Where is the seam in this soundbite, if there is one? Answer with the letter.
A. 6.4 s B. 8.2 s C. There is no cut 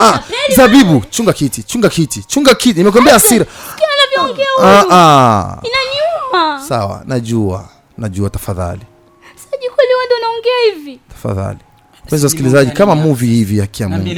C